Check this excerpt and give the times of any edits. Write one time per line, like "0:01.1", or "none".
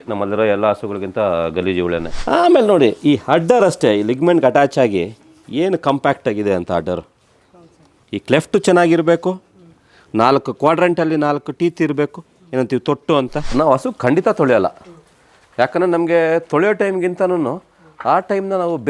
0:02.1
0:13.5